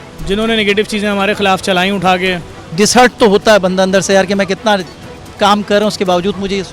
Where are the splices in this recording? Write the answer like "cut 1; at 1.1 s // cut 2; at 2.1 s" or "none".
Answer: cut 1; at 2.7 s

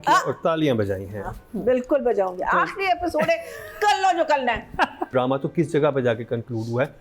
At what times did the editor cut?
cut 1; at 5.1 s

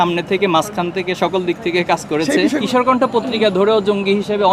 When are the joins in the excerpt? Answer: cut 1; at 2.6 s

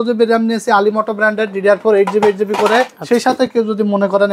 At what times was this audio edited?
cut 1; at 3.0 s

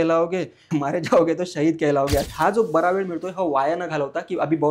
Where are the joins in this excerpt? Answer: cut 1; at 2.3 s

